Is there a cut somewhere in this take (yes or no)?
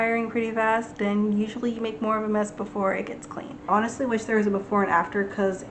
yes